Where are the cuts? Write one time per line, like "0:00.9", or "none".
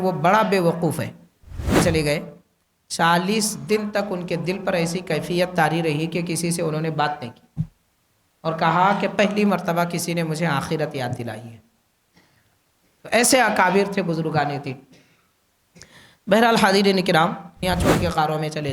0:01.8
0:17.6